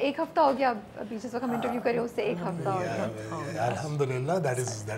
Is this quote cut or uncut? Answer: uncut